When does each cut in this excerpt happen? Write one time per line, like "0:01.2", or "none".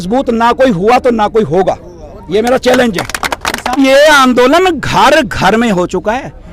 0:03.8